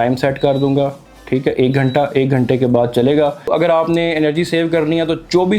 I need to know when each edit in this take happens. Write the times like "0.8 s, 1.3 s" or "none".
3.5 s